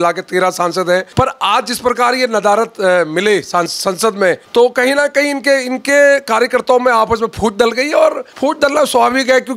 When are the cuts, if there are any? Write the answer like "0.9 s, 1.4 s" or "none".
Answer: 1.1 s, 4.4 s, 8.3 s